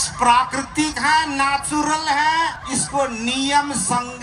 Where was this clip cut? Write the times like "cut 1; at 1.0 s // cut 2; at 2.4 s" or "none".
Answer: cut 1; at 2.6 s